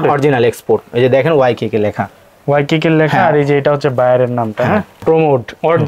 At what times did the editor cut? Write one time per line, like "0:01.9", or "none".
0:05.0